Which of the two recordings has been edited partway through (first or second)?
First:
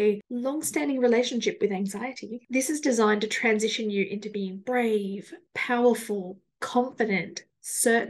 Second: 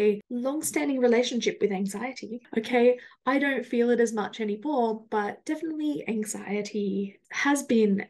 first